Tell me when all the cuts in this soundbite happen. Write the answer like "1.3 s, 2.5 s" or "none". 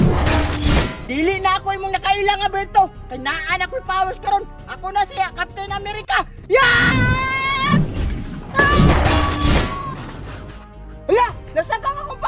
1.0 s